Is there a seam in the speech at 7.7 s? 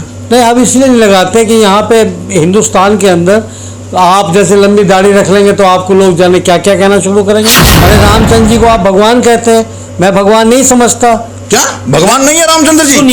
yes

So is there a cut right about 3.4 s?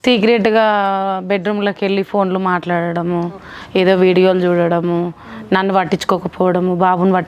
no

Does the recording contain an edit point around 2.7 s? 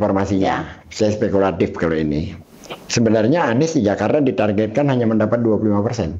no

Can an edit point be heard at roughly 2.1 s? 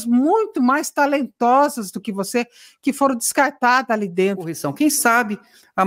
no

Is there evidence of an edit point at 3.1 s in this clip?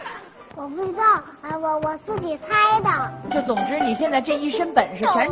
yes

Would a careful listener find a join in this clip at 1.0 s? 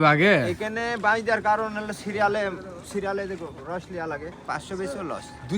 no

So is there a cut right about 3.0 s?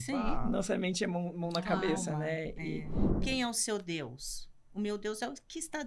yes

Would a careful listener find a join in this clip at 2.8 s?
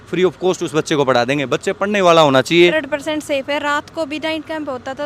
yes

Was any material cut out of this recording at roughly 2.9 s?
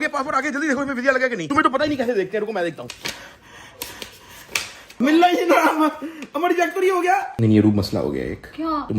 yes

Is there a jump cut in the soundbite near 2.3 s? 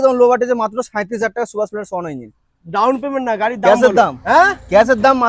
no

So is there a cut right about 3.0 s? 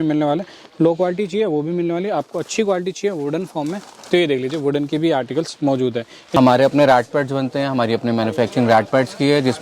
no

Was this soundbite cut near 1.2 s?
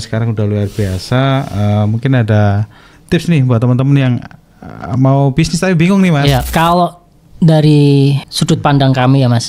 no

